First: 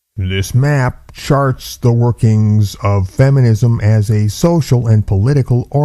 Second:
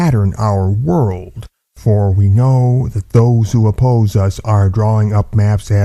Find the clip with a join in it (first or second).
first